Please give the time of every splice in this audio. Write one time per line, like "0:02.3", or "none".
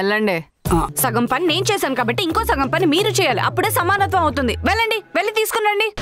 0:00.9